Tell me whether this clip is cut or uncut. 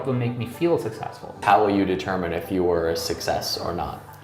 cut